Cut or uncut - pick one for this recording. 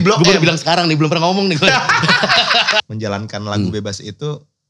cut